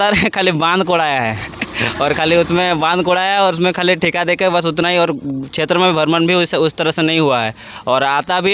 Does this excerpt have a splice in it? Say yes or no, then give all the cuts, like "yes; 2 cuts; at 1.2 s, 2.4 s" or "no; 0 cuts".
no; 0 cuts